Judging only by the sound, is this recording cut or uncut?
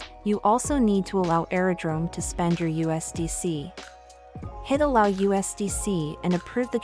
uncut